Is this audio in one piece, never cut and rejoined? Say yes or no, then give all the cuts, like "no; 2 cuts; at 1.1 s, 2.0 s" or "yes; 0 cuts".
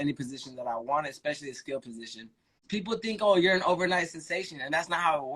no; 1 cut; at 2.6 s